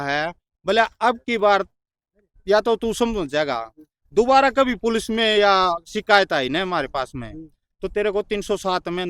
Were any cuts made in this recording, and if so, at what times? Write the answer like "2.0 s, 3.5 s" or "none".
none